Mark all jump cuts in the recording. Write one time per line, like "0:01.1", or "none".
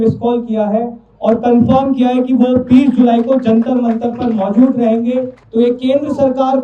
0:05.4